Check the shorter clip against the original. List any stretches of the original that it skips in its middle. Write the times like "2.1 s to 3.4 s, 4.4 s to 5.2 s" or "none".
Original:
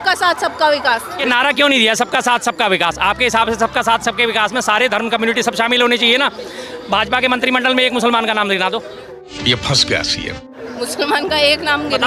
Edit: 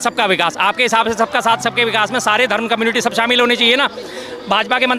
none

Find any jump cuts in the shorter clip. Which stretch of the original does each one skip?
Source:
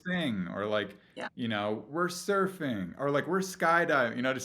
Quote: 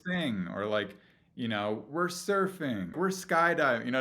2.9 s to 3.3 s

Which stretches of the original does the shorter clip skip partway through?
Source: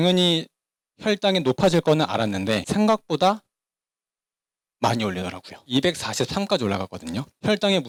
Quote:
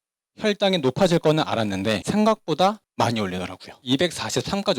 3.5 s to 4.7 s

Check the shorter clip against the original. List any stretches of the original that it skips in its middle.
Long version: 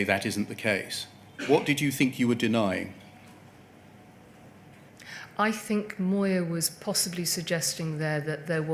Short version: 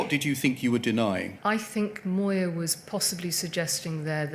2.9 s to 5.3 s

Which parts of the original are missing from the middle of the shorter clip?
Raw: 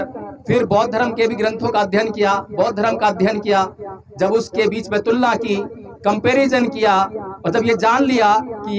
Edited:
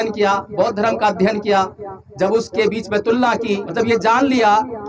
5.7 s to 7.5 s

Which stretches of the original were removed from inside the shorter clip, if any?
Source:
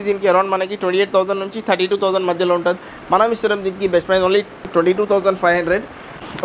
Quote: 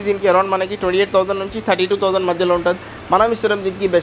none

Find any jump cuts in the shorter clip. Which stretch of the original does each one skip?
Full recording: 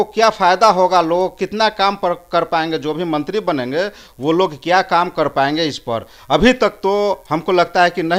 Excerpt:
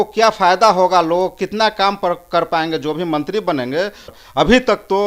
4.1 s to 6.1 s

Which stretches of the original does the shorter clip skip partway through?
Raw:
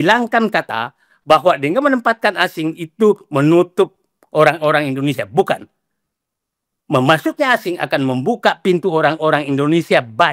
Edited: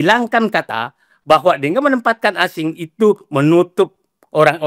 none

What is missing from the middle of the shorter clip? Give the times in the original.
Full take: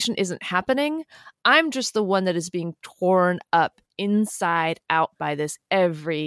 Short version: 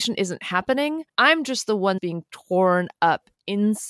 1.1 s to 1.3 s, 2.2 s to 2.5 s

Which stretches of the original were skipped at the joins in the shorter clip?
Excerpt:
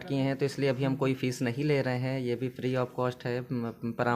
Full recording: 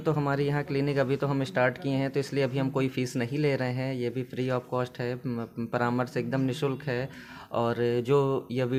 none

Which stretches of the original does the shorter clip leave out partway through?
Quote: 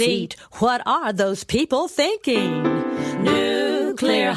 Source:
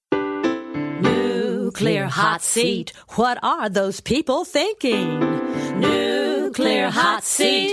none

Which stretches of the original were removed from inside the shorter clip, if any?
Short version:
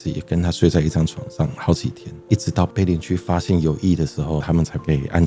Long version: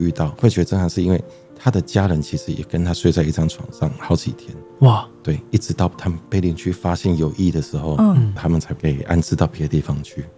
4.8 s to 5.9 s, 7.9 s to 8.3 s

